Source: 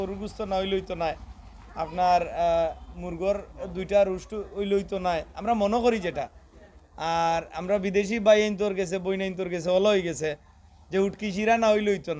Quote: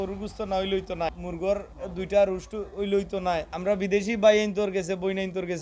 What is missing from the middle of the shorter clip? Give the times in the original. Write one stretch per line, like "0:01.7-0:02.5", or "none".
0:01.2-0:03.0
0:05.3-0:07.6